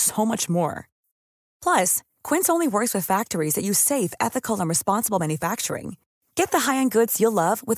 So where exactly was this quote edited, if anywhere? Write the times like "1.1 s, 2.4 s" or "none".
none